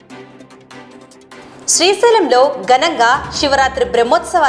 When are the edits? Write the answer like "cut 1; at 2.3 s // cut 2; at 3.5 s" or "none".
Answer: cut 1; at 1.1 s